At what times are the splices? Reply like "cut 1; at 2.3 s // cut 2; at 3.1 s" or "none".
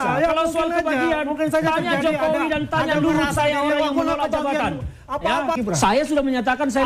cut 1; at 5.6 s